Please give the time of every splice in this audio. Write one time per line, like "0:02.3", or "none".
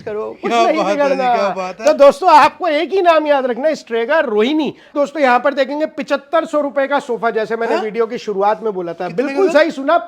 0:04.9